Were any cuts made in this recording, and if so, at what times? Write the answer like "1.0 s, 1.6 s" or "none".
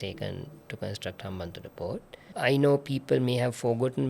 2.1 s